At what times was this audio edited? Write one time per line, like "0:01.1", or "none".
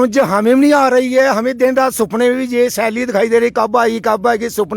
none